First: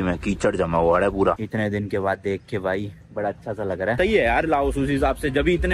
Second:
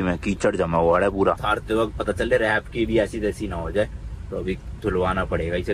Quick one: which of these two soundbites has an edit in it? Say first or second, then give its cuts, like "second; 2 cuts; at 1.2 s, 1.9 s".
first; 2 cuts; at 1.4 s, 4.0 s